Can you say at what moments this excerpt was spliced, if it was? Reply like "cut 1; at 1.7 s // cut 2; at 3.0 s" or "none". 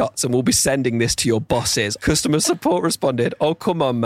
cut 1; at 2.1 s